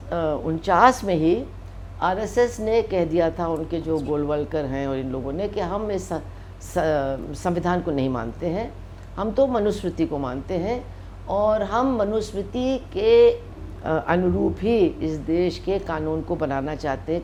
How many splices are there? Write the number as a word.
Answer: zero